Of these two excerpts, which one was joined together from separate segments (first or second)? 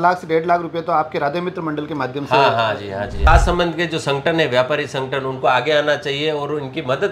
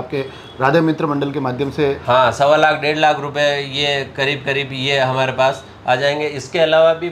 first